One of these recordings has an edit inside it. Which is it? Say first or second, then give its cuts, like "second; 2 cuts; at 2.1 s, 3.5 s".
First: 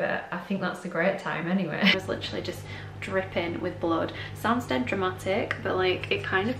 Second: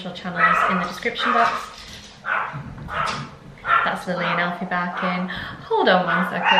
first; 2 cuts; at 1.9 s, 4.2 s